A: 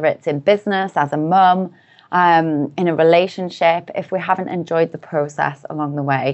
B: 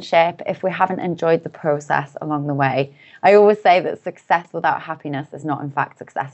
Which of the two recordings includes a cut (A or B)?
B